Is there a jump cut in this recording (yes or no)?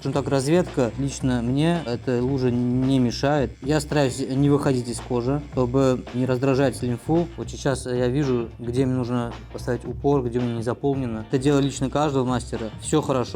yes